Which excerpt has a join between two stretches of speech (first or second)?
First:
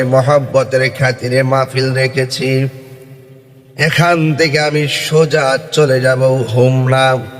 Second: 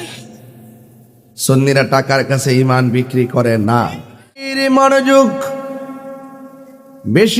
second